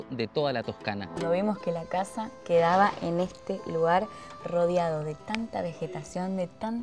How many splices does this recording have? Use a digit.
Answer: 1